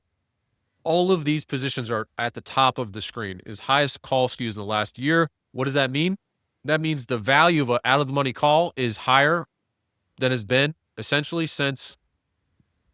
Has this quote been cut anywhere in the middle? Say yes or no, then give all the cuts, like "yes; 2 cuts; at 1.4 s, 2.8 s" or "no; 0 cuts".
no; 0 cuts